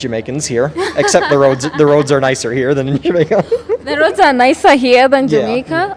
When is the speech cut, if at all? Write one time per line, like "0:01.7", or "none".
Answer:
none